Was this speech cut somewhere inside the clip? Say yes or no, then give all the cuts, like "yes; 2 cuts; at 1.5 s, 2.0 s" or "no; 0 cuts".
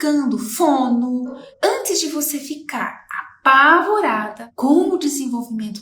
yes; 1 cut; at 1.4 s